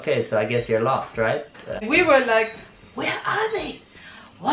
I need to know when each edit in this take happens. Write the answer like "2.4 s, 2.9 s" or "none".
1.9 s